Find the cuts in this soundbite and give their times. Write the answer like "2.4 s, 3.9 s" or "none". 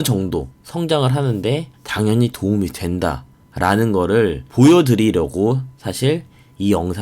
1.8 s, 4.4 s